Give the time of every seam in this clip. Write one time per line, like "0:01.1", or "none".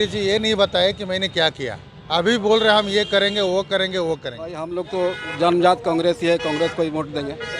0:04.7